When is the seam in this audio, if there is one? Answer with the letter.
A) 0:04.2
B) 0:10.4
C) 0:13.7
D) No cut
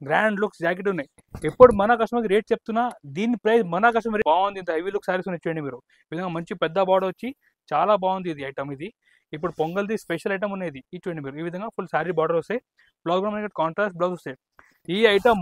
A